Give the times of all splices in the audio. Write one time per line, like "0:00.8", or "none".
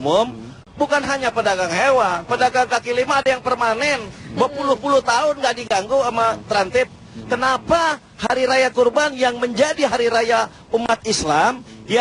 none